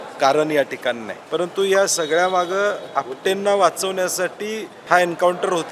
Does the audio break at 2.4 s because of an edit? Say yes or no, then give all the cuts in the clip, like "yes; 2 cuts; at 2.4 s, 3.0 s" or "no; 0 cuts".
no; 2 cuts; at 1.1 s, 4.7 s